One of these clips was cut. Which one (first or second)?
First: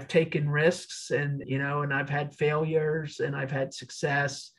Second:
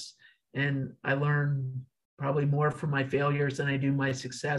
first